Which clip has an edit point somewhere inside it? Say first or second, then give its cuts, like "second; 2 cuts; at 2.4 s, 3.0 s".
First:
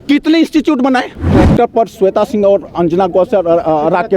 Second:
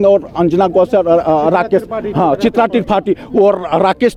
first; 1 cut; at 1.2 s